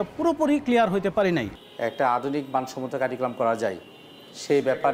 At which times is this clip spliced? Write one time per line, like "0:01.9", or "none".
0:01.6